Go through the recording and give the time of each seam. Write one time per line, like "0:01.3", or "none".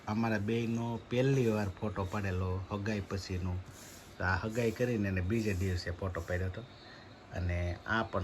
none